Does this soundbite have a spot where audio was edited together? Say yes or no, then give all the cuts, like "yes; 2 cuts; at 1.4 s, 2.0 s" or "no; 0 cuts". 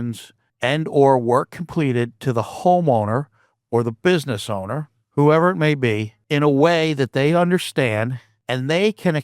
yes; 1 cut; at 5.0 s